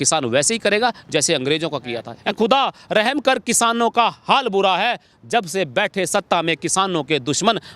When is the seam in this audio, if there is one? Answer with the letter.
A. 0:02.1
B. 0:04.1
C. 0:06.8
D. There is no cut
A